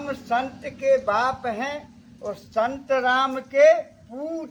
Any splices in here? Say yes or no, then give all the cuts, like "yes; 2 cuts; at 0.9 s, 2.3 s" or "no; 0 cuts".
no; 0 cuts